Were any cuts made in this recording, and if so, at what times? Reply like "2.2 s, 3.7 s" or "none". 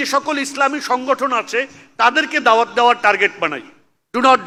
none